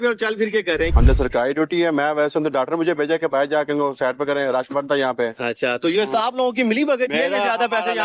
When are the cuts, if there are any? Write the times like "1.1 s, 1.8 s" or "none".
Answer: 0.9 s